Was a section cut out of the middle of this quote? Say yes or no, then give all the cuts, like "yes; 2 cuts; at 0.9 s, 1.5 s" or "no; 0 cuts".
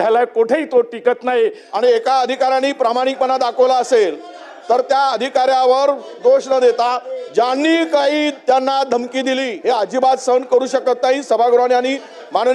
yes; 2 cuts; at 1.6 s, 9.5 s